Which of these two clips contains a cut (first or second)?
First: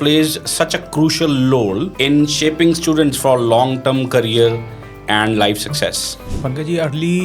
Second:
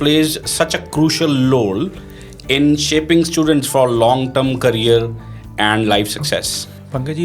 first